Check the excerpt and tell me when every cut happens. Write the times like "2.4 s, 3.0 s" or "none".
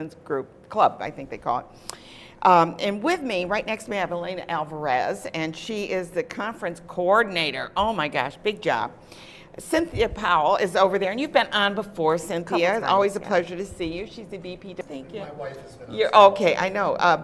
none